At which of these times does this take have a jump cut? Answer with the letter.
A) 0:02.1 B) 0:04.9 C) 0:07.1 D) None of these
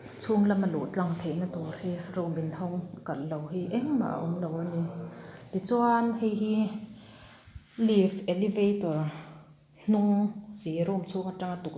A